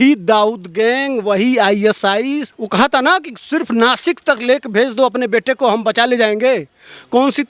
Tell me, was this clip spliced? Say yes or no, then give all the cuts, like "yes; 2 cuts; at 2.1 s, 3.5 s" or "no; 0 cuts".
yes; 1 cut; at 2.6 s